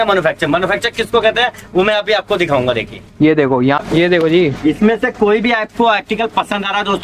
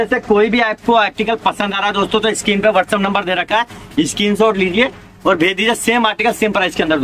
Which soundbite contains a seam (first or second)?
first